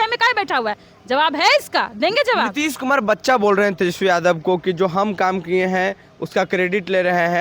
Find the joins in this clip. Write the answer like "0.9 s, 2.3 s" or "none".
none